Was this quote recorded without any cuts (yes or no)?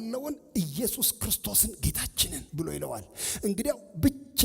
no